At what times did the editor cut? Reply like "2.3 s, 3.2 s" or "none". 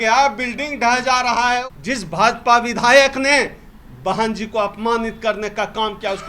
1.6 s